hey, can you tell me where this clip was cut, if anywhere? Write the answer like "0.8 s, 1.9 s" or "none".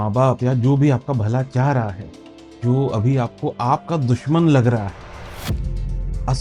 none